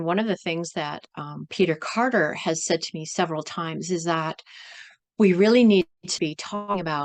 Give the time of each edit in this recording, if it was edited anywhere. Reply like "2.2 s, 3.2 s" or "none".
none